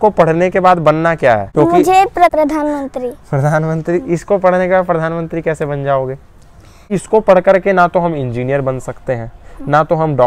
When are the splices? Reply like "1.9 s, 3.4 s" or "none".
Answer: 1.5 s, 2.3 s, 6.9 s